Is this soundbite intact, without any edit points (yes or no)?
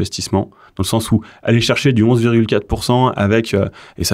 yes